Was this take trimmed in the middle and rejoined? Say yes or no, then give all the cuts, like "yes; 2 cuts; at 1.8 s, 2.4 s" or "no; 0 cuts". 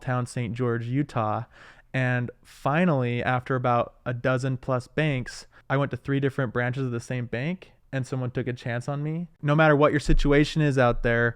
yes; 2 cuts; at 5.5 s, 9.4 s